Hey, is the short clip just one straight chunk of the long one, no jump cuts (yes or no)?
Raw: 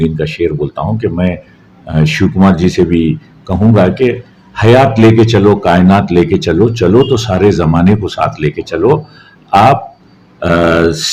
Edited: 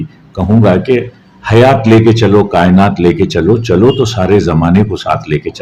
yes